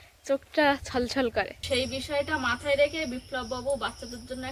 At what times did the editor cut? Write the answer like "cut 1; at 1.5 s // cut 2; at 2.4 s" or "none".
cut 1; at 1.6 s